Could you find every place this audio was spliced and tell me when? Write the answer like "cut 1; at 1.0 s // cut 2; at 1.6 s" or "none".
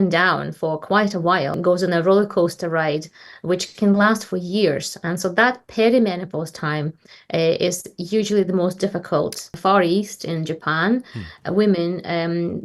cut 1; at 1.6 s // cut 2; at 9.6 s